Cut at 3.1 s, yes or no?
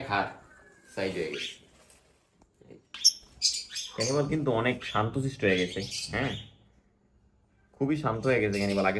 yes